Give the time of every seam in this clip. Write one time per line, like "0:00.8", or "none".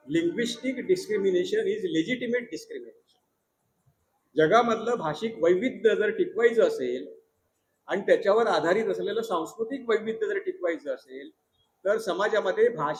none